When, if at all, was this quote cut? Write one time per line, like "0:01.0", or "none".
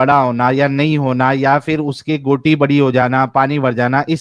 none